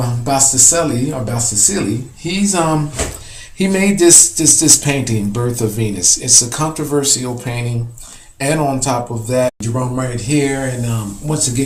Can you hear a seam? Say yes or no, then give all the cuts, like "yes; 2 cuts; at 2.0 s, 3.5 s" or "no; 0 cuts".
no; 0 cuts